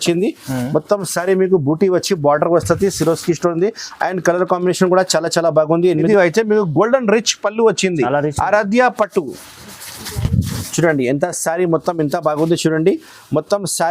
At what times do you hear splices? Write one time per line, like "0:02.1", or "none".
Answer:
0:06.1